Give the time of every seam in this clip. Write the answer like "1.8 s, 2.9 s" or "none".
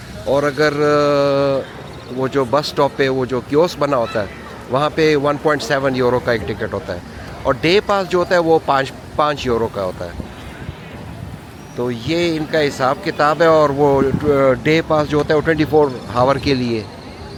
none